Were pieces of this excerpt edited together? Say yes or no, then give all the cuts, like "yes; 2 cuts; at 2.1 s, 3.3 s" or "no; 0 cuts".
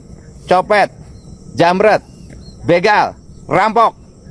no; 0 cuts